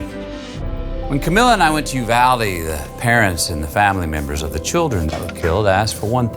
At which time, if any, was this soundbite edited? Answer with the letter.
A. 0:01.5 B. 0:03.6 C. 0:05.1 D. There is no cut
A